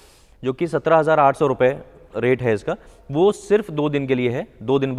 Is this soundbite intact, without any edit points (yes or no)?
yes